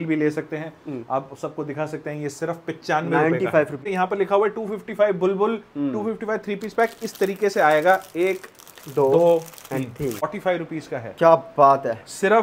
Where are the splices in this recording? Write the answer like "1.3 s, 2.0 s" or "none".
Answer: 3.9 s, 10.3 s